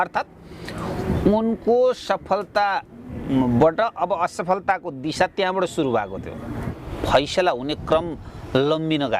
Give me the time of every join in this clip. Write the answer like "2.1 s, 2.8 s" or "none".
6.7 s